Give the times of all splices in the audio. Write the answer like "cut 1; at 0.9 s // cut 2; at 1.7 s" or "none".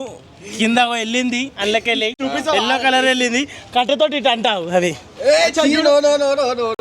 cut 1; at 2.1 s